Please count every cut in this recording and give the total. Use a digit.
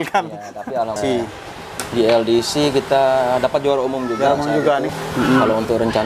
2